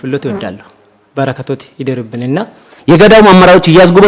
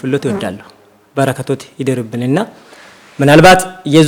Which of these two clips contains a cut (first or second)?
first